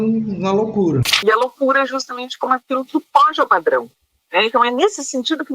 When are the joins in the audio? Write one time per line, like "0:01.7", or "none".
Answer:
0:01.1